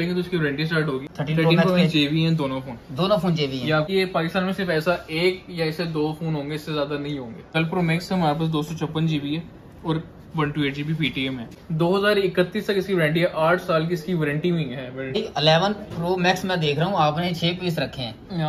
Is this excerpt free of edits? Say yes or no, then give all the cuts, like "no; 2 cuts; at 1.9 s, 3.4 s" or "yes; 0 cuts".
no; 5 cuts; at 1.1 s, 3.9 s, 7.5 s, 11.5 s, 15.2 s